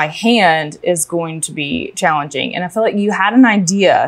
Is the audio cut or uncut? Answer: uncut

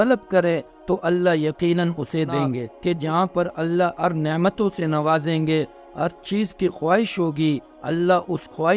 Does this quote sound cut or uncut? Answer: cut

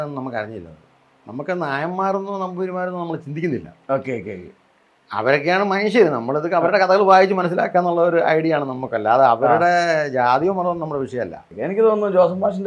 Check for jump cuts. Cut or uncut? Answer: cut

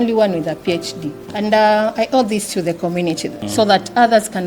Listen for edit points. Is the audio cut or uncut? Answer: cut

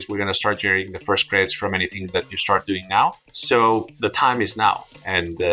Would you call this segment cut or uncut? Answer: uncut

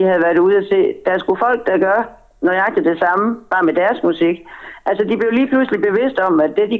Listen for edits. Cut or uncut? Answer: uncut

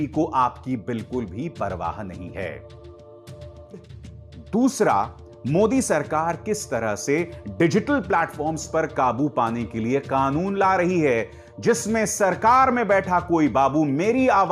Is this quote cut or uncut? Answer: cut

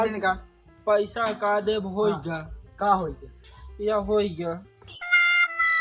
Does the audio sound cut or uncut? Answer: cut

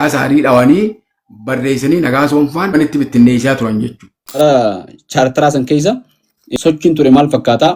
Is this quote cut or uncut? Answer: cut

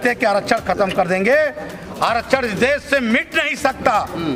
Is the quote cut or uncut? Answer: uncut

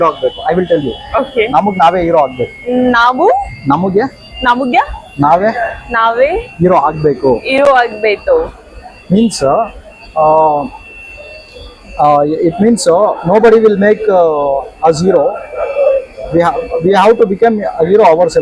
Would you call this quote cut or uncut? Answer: uncut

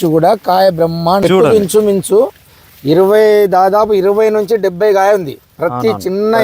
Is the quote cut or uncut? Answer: cut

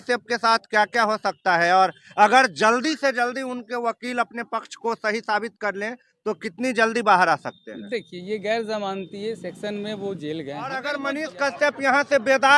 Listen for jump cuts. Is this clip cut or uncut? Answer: cut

